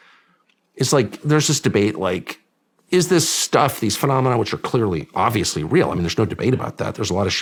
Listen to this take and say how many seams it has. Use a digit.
0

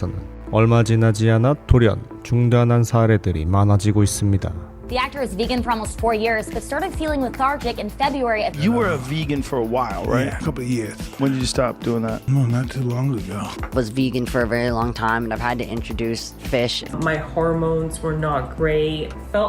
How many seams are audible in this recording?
1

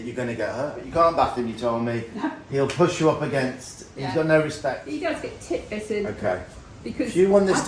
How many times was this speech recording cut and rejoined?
2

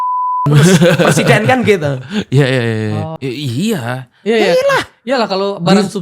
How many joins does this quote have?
0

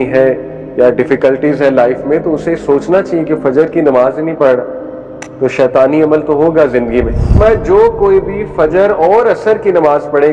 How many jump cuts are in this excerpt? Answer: 1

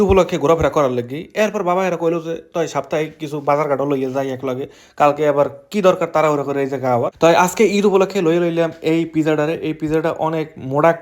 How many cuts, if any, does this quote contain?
1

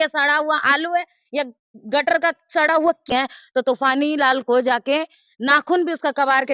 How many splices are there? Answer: 1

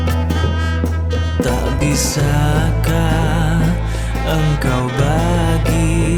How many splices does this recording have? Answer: 0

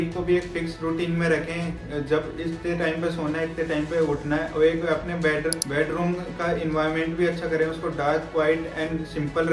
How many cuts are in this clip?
1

